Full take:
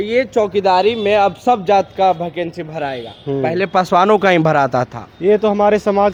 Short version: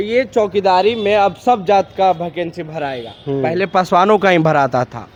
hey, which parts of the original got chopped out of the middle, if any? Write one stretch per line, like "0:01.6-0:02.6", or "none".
none